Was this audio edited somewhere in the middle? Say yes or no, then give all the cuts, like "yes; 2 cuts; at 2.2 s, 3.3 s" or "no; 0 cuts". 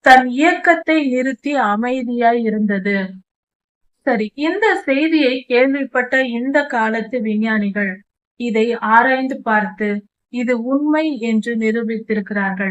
no; 0 cuts